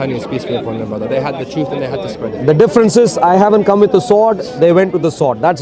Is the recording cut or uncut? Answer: uncut